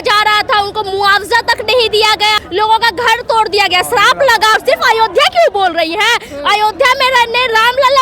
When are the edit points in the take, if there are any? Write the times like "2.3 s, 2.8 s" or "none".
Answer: 2.4 s, 4.6 s